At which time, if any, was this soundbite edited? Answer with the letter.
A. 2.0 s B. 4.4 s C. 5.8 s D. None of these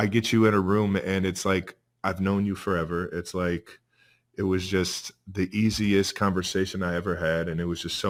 D